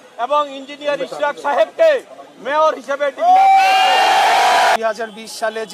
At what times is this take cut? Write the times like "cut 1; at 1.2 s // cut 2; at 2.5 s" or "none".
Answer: cut 1; at 4.8 s

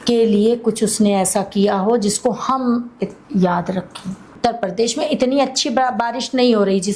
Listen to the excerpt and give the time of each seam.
cut 1; at 4.3 s

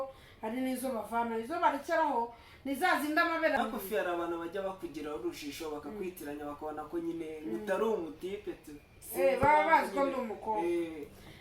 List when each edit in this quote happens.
cut 1; at 3.6 s

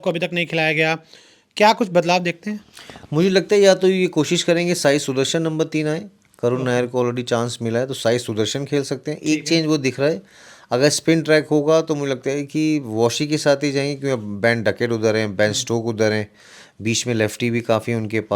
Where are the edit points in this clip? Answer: none

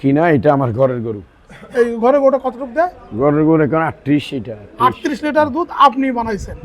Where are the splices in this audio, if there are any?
none

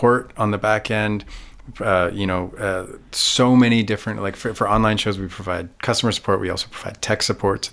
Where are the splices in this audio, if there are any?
none

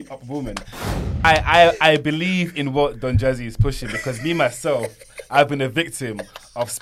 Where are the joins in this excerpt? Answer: cut 1; at 0.9 s

